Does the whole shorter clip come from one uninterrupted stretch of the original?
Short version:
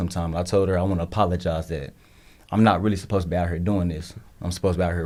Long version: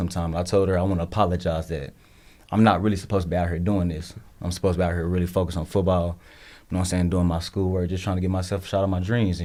yes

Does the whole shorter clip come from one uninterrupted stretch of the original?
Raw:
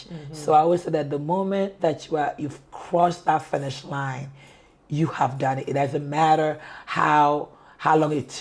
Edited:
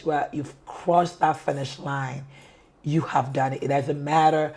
yes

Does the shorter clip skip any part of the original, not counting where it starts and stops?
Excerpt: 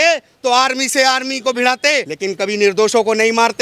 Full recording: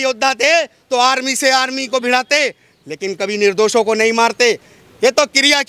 yes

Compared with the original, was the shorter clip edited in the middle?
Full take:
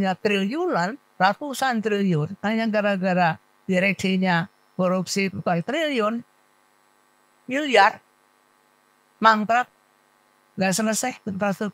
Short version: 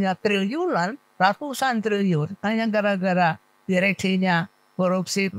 no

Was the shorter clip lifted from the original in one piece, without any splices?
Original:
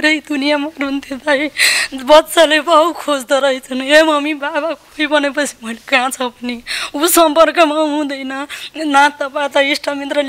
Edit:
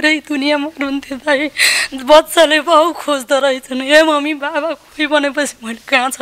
yes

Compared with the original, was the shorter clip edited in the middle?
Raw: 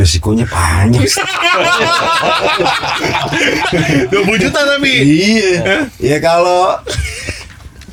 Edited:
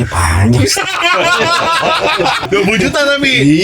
yes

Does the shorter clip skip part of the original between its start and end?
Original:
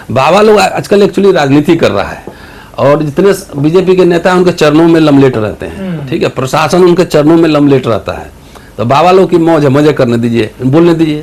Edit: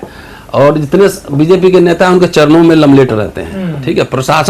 no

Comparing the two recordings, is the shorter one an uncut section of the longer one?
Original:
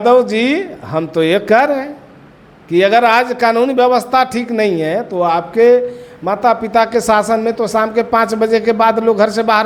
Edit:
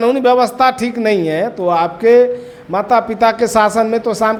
yes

